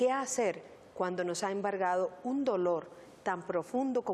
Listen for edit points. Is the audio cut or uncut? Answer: uncut